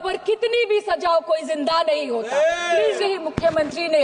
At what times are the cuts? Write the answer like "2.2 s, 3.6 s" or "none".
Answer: 3.0 s